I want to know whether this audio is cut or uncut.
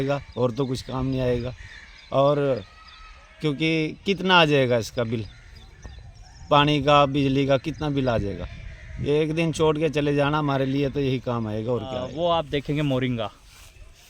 cut